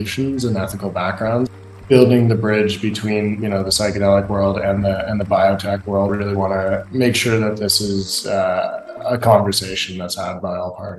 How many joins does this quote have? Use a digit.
2